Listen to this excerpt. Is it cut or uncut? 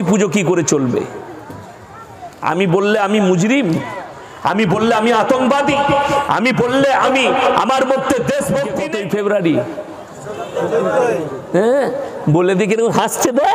cut